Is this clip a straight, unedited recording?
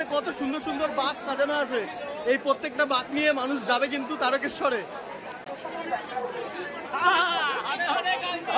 no; 1 cut; at 5.5 s

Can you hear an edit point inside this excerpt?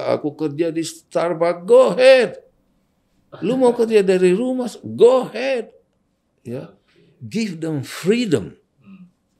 no; 0 cuts

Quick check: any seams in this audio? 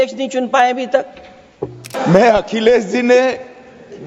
yes; 1 cut; at 1.9 s

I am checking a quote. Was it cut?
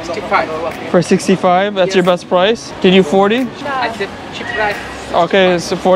yes; 2 cuts; at 2.7 s, 3.6 s

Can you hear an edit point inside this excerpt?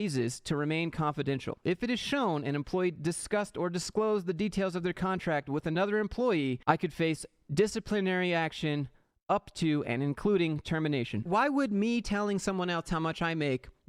yes; 2 cuts; at 1.6 s, 11.2 s

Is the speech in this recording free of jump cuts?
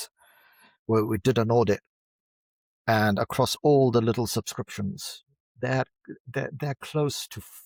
yes; 0 cuts

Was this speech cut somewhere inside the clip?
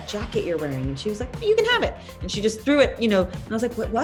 no; 0 cuts

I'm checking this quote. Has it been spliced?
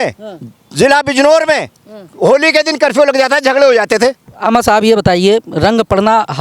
yes; 1 cut; at 4.3 s

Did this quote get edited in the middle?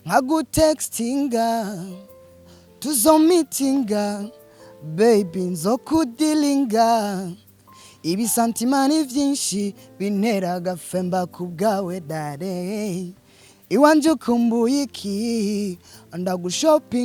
no; 0 cuts

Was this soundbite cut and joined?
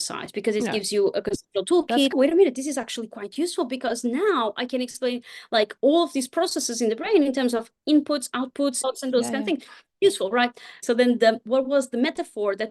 yes; 3 cuts; at 2.1 s, 8.8 s, 10.8 s

